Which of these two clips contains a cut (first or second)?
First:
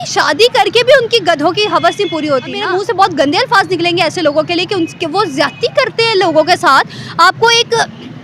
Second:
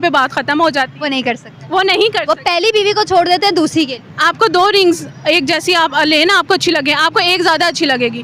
first